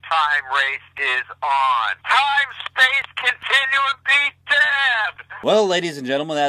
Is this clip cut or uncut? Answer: uncut